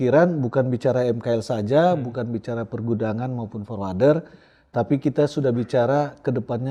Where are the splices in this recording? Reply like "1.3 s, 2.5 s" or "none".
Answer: none